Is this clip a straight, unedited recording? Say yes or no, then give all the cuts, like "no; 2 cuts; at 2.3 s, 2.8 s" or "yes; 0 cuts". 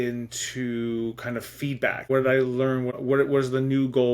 no; 2 cuts; at 2.0 s, 3.0 s